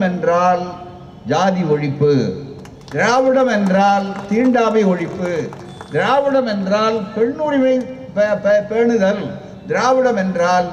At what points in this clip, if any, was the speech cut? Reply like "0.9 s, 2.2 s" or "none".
none